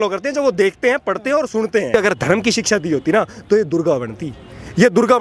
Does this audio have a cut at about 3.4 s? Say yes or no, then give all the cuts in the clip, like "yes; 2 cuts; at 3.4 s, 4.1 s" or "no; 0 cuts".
no; 1 cut; at 1.9 s